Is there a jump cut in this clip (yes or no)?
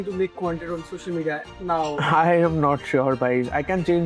yes